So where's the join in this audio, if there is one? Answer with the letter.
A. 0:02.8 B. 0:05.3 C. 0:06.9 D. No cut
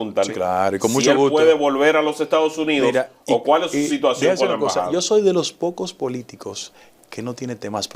D